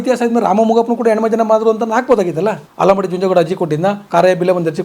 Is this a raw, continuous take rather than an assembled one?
no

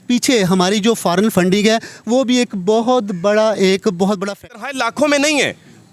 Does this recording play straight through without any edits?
no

